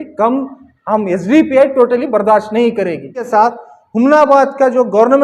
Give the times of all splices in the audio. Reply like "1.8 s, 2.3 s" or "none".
3.3 s

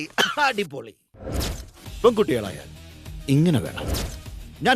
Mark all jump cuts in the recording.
none

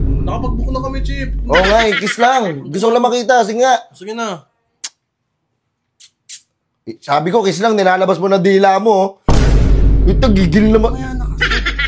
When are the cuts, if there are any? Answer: none

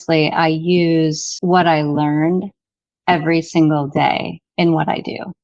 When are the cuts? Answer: 1.3 s

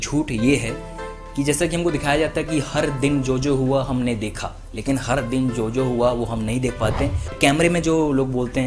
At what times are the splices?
7.3 s

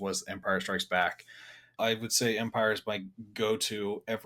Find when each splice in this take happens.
1.7 s

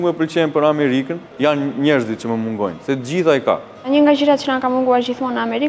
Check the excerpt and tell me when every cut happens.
1.3 s, 3.7 s

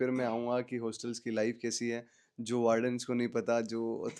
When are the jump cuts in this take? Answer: none

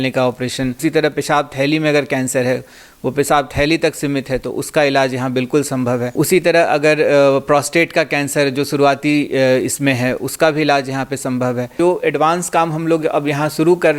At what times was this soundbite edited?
0.8 s, 11.7 s

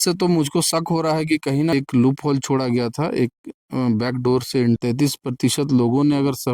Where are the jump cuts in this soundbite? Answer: 1.7 s, 4.8 s

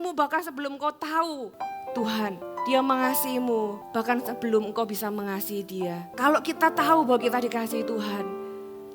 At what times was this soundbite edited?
1.5 s, 2.5 s, 3.8 s, 6.1 s

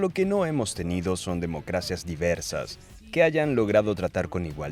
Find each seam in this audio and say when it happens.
2.9 s

